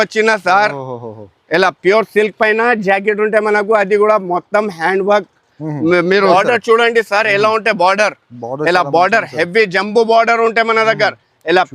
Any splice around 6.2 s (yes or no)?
yes